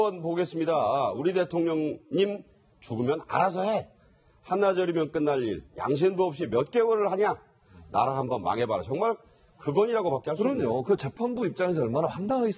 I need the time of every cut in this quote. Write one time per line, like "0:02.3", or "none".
none